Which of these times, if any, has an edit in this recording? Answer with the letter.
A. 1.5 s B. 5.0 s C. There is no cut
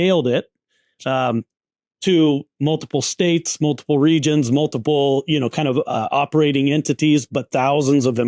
C